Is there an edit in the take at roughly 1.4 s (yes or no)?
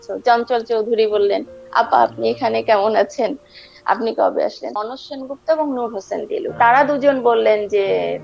no